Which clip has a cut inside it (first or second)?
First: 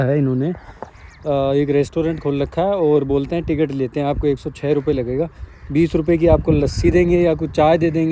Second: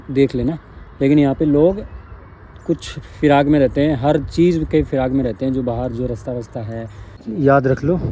second